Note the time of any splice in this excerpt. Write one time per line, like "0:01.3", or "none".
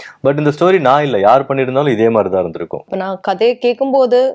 0:02.9

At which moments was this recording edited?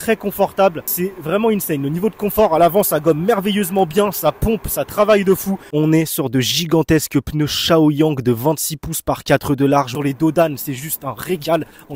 0:00.9
0:05.7
0:09.9

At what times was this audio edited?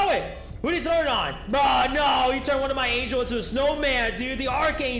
none

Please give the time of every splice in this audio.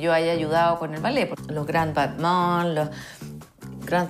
0:01.4

